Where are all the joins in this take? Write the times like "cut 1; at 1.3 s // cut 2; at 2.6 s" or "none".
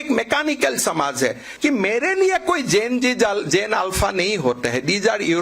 cut 1; at 1.5 s